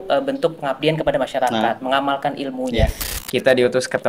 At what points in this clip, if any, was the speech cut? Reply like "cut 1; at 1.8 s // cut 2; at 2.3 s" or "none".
cut 1; at 3.1 s